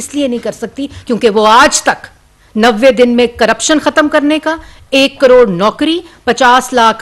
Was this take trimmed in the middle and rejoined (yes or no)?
no